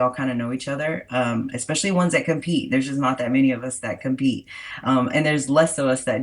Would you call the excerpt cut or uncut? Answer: uncut